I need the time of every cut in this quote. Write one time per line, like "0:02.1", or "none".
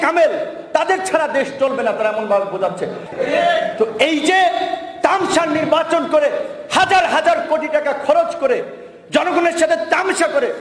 0:03.0